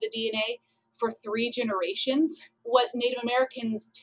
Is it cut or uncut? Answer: cut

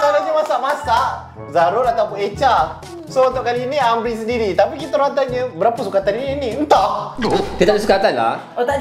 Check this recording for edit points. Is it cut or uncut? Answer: uncut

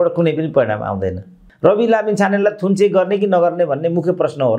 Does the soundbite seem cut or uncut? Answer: cut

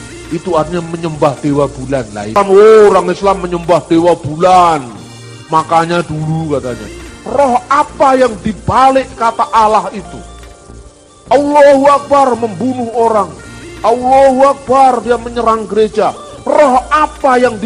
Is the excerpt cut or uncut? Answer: cut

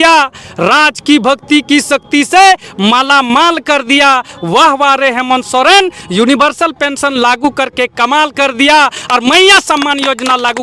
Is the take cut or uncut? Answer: uncut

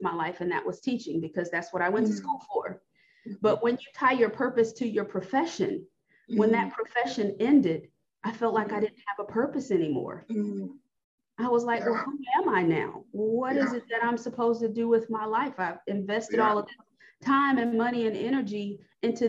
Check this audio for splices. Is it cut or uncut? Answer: uncut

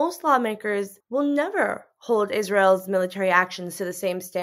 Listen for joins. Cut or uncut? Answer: uncut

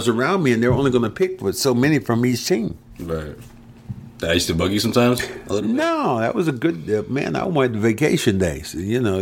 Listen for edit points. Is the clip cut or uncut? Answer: uncut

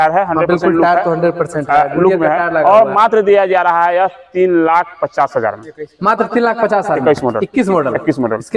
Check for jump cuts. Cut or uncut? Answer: uncut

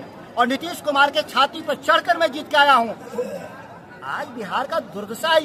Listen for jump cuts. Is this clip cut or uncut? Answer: uncut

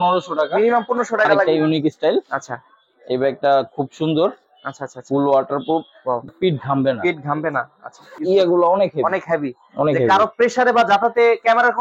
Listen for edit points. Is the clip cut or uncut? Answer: cut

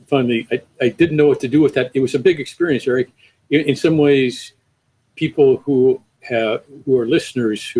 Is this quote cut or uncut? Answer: uncut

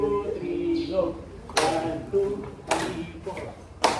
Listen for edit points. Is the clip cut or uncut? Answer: uncut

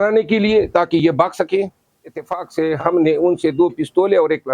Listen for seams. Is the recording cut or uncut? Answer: cut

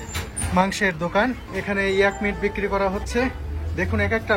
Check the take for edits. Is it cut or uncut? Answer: cut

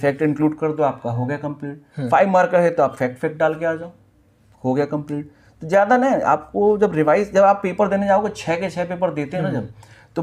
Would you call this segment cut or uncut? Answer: uncut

